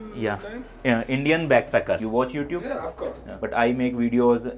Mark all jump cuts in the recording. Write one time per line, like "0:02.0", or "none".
none